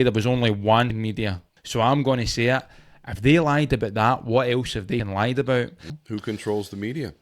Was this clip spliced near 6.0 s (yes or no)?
yes